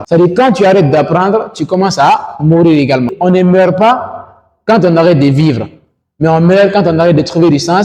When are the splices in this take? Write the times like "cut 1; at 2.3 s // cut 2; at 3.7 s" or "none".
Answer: cut 1; at 3.1 s